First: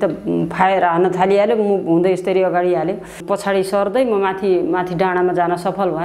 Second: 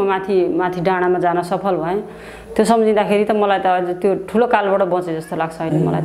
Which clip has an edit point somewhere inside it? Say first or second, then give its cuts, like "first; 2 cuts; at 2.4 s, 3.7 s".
first; 1 cut; at 3.2 s